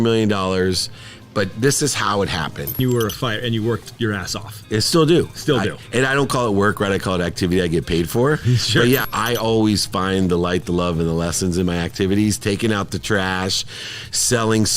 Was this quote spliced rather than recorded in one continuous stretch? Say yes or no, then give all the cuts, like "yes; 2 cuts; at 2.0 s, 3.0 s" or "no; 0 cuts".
yes; 2 cuts; at 2.8 s, 9.0 s